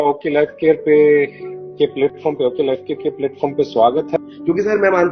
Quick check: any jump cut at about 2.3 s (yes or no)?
no